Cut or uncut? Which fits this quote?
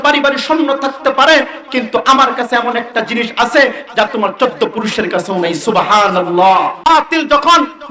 cut